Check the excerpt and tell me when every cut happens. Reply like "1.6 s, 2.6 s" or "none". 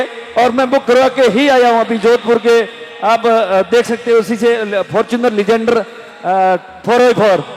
none

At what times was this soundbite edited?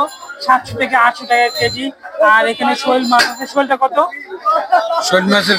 none

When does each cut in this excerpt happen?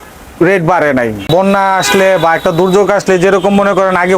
1.3 s

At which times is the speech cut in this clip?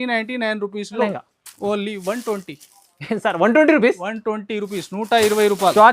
1.1 s

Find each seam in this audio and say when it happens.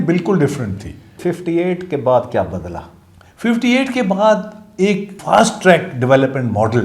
1.1 s, 5.1 s

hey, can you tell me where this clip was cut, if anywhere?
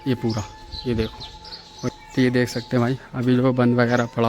1.9 s

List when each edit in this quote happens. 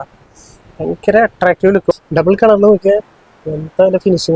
1.9 s

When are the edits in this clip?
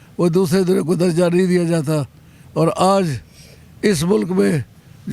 none

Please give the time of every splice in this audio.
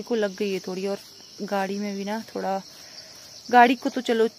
none

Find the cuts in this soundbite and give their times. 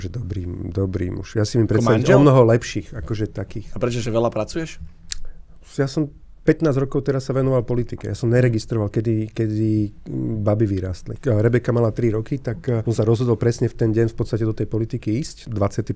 none

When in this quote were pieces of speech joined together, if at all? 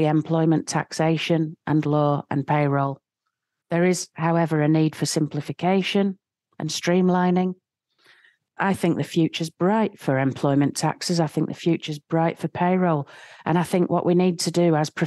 8.4 s

